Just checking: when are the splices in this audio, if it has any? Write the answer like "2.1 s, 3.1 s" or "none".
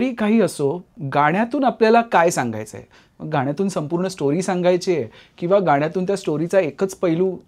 1.0 s